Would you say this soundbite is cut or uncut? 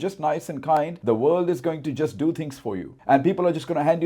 cut